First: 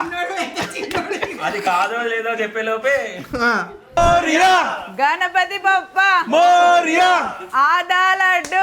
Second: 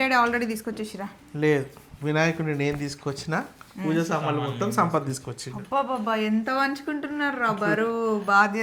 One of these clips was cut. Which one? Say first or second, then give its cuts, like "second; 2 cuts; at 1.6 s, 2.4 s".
first; 1 cut; at 3.9 s